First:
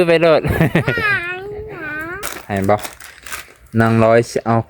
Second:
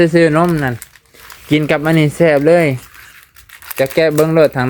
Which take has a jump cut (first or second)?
first